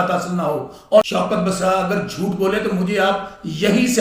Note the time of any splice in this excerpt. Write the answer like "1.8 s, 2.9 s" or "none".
1.0 s